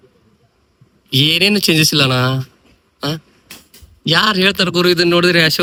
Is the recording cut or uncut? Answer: uncut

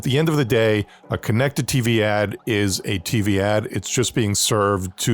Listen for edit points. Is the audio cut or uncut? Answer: cut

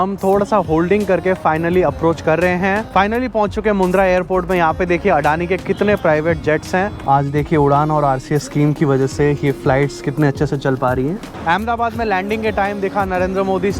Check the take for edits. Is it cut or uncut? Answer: cut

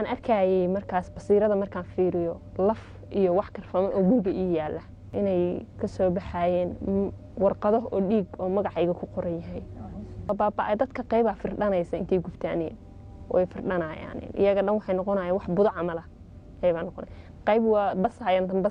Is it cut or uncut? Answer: cut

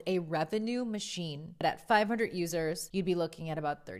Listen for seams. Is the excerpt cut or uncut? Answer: cut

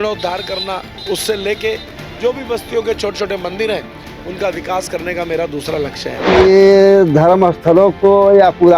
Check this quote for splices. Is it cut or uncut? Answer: cut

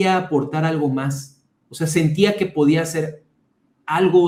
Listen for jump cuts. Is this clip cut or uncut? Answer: uncut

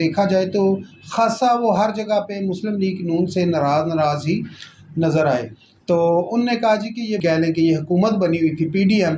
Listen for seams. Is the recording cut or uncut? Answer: cut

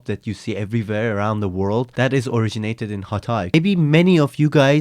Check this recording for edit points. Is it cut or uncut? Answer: cut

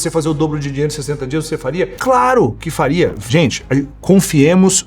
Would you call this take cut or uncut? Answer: cut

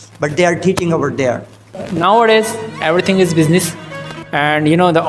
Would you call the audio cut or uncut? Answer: cut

